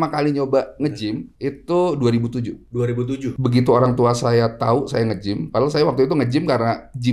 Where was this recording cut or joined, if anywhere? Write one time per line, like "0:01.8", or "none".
0:03.3

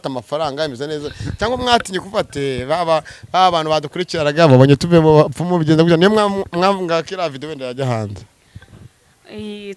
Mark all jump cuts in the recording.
none

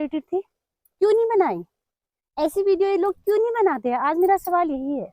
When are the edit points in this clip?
none

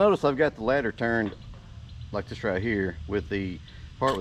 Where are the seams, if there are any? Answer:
none

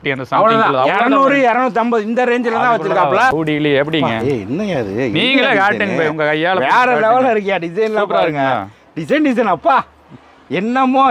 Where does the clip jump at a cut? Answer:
0:03.3

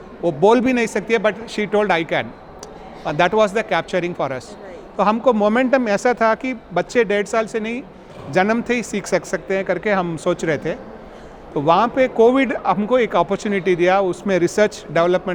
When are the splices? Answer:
none

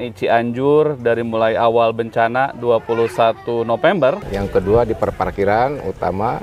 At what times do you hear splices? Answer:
0:04.3

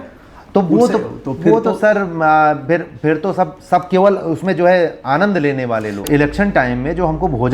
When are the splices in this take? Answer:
0:06.0

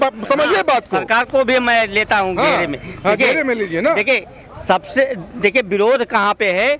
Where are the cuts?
none

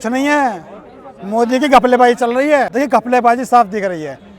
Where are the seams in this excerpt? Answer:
0:02.7

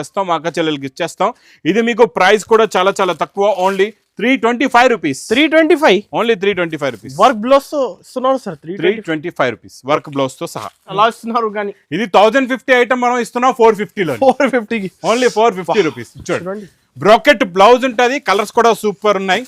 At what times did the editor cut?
0:10.9

